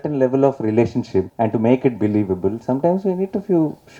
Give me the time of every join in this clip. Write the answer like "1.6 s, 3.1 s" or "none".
1.3 s